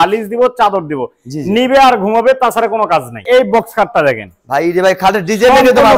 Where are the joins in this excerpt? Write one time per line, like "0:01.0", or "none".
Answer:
0:03.3